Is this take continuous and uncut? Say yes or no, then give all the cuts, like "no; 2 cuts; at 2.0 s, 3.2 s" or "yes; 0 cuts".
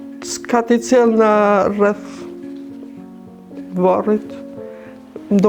yes; 0 cuts